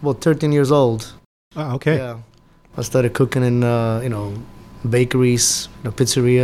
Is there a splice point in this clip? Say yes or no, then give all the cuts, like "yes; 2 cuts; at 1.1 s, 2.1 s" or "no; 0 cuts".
no; 0 cuts